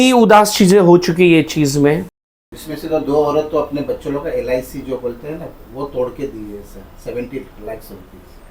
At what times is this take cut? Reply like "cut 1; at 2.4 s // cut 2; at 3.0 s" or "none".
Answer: none